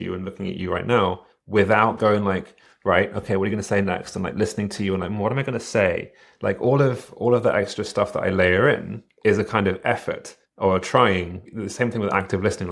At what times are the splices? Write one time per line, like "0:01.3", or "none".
none

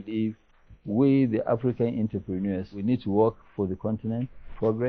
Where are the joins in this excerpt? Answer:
0:02.8

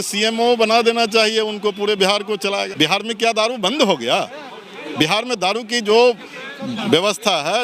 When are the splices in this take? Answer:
0:02.7

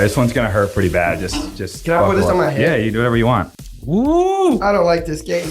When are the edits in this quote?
0:03.5

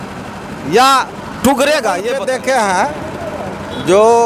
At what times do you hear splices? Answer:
0:02.2

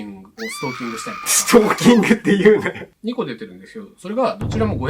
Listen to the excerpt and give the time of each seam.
0:02.9

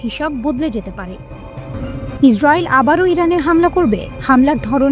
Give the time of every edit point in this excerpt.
0:01.7

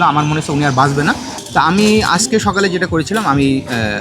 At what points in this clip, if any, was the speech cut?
0:01.3

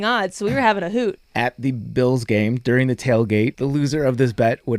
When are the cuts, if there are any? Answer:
0:01.2
0:03.6

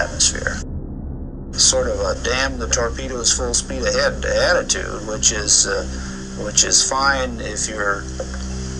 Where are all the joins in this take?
0:02.2

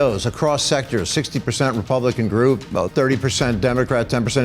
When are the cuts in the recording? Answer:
0:02.7

